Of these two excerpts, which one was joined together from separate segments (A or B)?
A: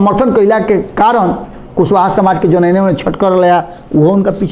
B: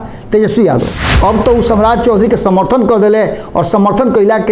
B